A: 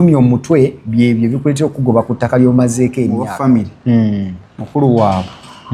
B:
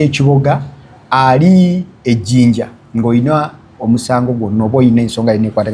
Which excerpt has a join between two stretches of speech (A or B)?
A